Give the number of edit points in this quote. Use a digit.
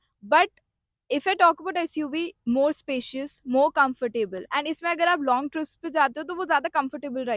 0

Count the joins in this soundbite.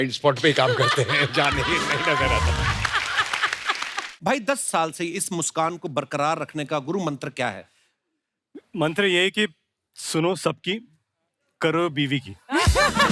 1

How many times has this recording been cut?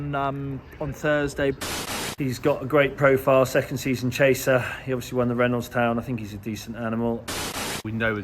2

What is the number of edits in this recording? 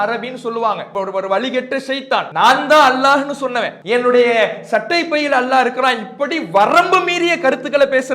3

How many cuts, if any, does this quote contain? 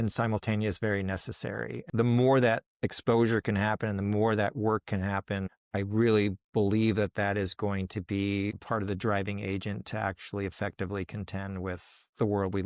1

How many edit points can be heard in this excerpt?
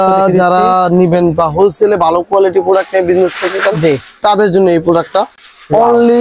0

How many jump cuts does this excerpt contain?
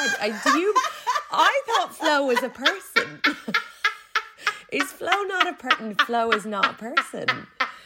0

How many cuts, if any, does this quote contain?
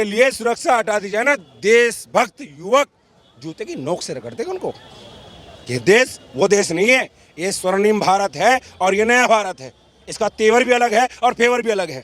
0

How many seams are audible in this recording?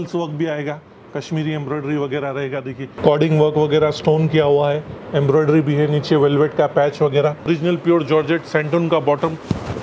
2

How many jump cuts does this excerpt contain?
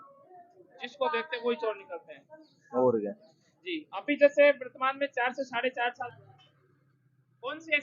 1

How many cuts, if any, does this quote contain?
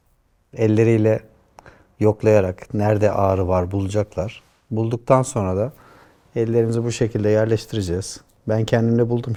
0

